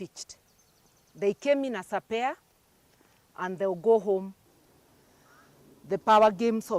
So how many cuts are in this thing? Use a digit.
1